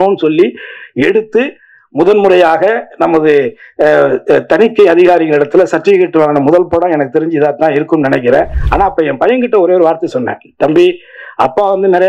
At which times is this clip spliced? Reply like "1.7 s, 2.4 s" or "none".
8.6 s